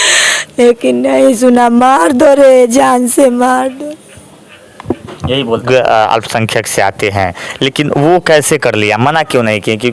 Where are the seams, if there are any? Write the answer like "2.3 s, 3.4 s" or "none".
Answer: 5.6 s